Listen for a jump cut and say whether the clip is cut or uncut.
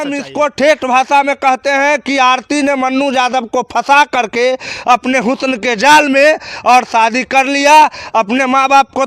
uncut